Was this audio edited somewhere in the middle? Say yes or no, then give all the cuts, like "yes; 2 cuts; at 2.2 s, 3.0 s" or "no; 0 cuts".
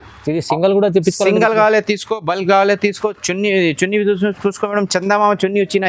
no; 0 cuts